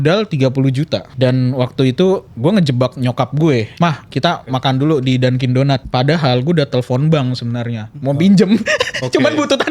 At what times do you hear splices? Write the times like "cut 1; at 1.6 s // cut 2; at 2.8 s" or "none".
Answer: cut 1; at 1.1 s // cut 2; at 2.3 s // cut 3; at 3.7 s // cut 4; at 5.9 s